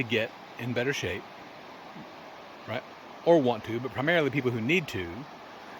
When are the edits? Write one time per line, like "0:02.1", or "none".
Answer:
none